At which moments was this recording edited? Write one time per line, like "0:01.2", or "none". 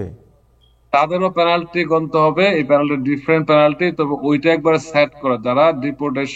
none